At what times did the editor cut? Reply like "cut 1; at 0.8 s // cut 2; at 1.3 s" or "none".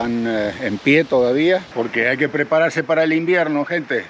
cut 1; at 1.7 s